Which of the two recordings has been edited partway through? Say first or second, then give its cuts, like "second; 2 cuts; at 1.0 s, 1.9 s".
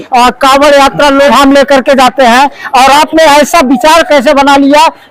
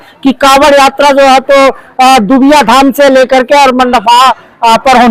first; 1 cut; at 1.3 s